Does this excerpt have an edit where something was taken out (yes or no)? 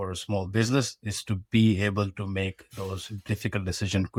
no